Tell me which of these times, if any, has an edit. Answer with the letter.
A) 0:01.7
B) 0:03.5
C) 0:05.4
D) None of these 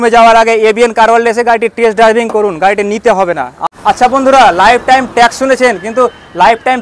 B